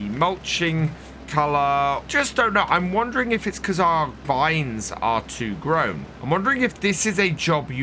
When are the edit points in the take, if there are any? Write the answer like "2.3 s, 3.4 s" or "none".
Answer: 1.2 s, 2.1 s, 6.1 s